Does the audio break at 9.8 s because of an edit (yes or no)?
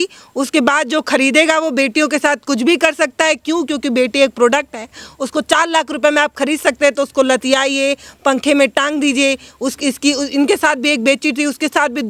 no